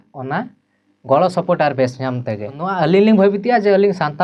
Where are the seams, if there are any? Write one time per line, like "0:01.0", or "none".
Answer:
0:02.6